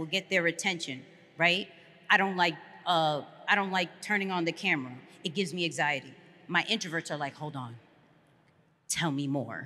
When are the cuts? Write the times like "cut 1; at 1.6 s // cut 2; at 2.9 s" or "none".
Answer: none